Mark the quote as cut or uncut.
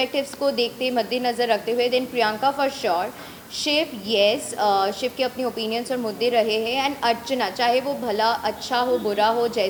uncut